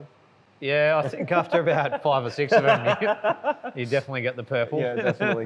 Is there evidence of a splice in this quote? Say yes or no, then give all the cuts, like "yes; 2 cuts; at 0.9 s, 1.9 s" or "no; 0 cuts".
no; 0 cuts